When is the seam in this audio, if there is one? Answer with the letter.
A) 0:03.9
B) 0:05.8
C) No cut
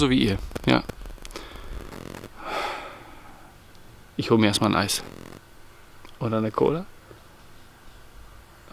C